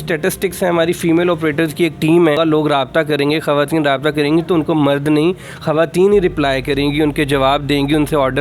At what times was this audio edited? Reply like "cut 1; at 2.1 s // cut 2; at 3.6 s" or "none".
cut 1; at 2.4 s